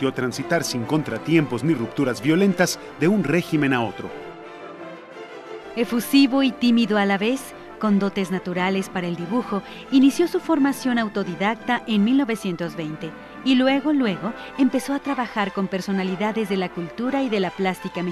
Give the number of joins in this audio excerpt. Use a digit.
1